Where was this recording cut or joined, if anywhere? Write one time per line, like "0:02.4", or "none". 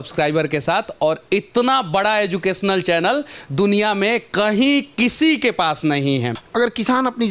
0:06.4